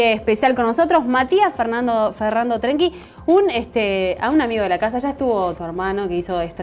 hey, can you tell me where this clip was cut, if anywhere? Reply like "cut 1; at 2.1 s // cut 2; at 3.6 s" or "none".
none